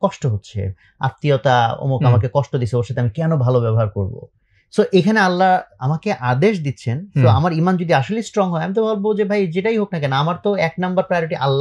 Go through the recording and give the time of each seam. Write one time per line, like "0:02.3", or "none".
none

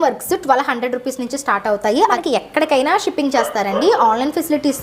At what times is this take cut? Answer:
0:02.2

